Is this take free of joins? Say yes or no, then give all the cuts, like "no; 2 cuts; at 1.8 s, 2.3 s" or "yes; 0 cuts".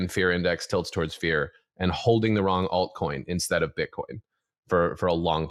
yes; 0 cuts